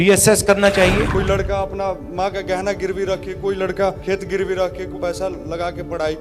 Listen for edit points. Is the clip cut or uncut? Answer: cut